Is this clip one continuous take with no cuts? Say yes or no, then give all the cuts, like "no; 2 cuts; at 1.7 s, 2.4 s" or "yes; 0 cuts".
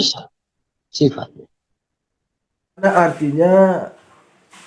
no; 1 cut; at 2.8 s